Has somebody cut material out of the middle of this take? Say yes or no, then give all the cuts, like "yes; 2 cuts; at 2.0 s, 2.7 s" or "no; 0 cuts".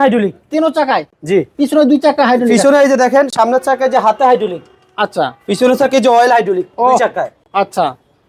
no; 0 cuts